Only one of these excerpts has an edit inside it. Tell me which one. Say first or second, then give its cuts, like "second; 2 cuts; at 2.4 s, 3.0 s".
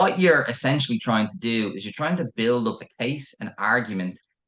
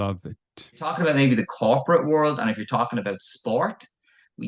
second; 1 cut; at 0.9 s